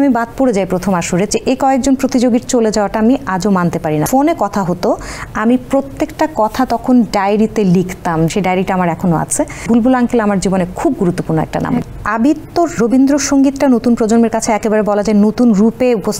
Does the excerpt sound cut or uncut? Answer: cut